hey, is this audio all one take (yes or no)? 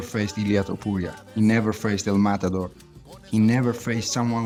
yes